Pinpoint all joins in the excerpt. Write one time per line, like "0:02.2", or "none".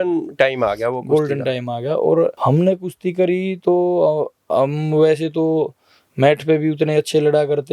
none